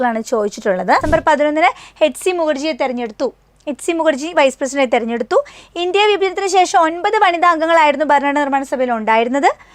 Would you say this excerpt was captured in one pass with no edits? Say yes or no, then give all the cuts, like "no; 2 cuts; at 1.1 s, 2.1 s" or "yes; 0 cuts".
no; 1 cut; at 1.0 s